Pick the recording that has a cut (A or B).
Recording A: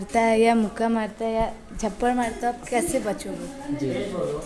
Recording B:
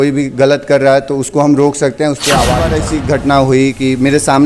B